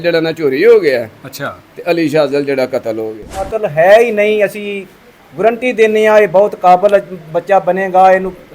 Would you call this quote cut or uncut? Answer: cut